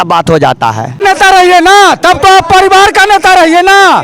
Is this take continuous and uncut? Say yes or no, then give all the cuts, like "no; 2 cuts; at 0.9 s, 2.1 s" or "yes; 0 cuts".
no; 1 cut; at 1.0 s